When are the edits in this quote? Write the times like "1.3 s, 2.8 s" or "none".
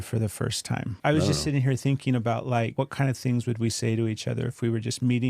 1.0 s, 2.7 s